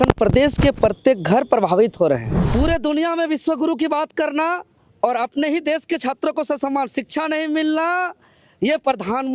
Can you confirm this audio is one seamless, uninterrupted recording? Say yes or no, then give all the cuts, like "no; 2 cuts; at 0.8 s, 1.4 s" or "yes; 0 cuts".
no; 1 cut; at 2.4 s